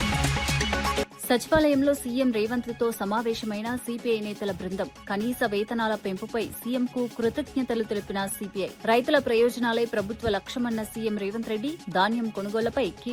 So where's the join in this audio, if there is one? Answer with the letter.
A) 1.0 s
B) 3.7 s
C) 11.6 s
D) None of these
A